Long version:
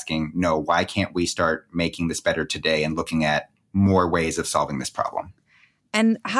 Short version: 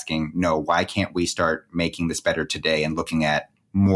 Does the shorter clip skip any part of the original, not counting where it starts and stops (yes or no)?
no